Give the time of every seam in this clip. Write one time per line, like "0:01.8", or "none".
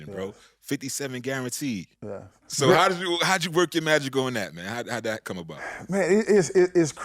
0:02.5